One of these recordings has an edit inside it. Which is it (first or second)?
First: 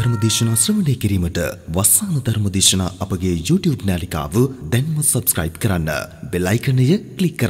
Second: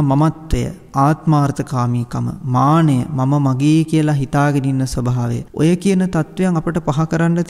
second